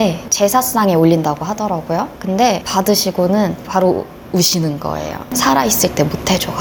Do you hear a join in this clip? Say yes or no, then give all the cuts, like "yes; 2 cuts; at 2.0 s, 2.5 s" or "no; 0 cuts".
no; 0 cuts